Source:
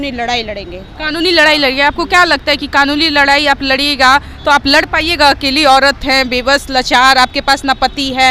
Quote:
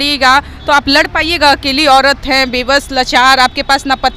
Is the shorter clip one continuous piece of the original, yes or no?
yes